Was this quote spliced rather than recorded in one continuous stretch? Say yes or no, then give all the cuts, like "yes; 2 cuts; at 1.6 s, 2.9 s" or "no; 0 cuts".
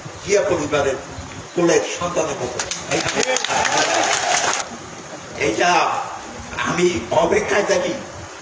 yes; 1 cut; at 4.6 s